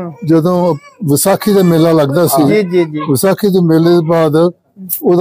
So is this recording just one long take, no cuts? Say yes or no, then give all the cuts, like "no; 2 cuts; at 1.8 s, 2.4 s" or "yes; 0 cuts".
yes; 0 cuts